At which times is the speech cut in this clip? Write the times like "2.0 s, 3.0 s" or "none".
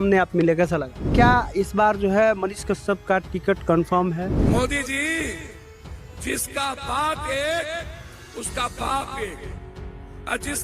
1.1 s, 4.4 s